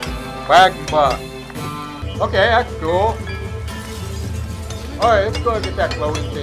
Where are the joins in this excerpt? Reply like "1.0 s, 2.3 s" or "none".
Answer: 2.0 s